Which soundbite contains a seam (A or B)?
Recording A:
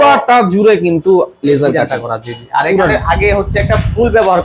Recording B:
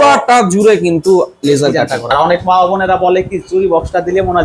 B